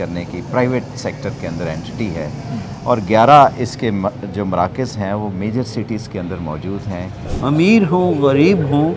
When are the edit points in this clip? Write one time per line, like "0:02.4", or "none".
0:07.2